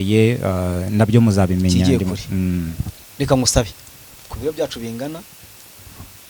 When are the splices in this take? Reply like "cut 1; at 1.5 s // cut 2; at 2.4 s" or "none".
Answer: none